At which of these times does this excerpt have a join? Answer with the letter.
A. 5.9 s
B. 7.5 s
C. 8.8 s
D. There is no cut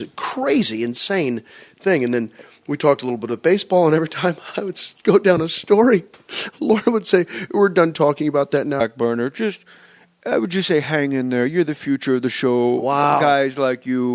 D